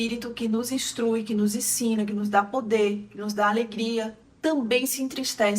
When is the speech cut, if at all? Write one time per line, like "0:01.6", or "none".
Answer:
0:04.3